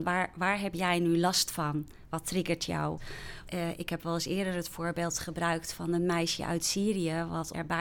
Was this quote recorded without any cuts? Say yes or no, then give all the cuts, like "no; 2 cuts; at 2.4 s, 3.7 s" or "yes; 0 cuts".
yes; 0 cuts